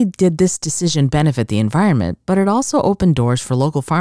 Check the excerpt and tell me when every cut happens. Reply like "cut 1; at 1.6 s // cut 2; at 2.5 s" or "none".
none